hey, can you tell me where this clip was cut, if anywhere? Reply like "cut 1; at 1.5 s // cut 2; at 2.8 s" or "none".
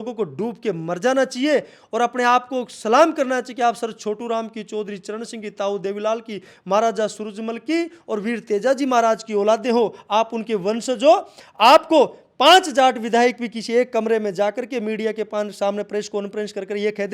none